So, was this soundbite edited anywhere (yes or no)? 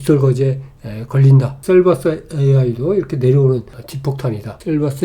yes